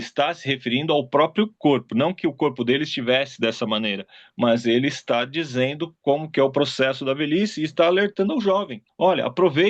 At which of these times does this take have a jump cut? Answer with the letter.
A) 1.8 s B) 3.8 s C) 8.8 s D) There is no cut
C